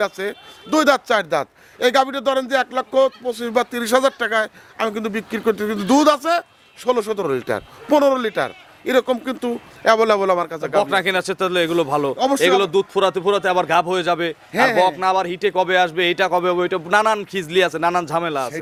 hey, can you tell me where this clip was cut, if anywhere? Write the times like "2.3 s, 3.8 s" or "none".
none